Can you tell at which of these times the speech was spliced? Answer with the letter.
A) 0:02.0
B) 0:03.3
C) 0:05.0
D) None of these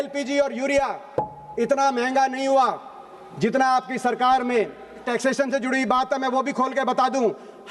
C